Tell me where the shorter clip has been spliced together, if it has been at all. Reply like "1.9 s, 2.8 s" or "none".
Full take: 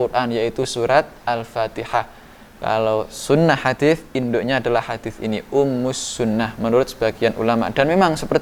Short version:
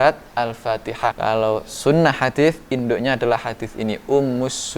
1.2 s